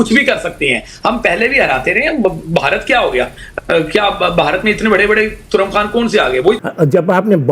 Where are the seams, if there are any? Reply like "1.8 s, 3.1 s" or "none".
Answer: 6.6 s